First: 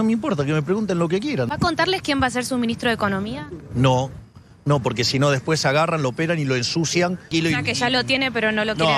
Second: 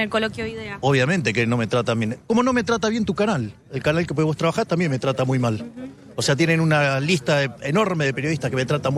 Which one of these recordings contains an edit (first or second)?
first